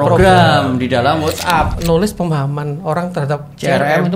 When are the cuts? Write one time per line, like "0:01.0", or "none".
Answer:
0:01.7